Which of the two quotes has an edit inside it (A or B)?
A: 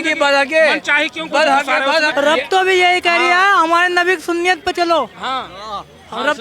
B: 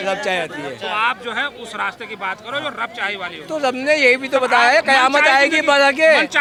A